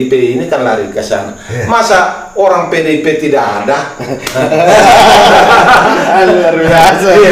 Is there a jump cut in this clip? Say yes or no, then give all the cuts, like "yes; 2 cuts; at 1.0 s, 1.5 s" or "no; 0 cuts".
no; 0 cuts